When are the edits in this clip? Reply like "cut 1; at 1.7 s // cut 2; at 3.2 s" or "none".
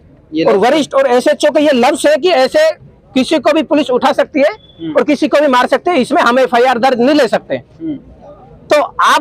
none